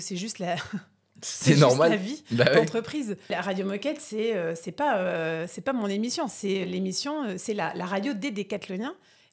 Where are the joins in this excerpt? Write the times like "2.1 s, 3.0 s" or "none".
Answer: 3.3 s